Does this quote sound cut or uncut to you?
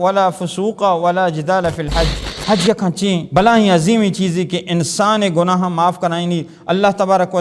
cut